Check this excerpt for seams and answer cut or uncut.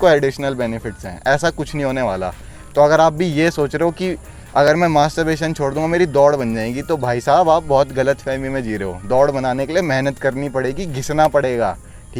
uncut